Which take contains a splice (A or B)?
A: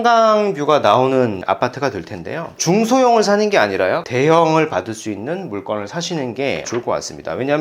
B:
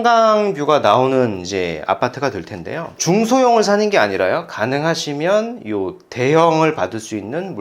A